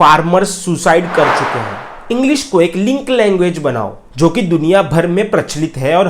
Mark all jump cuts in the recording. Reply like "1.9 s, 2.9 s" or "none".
1.8 s